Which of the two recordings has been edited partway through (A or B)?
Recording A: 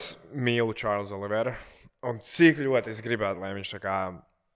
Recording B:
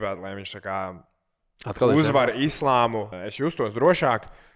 B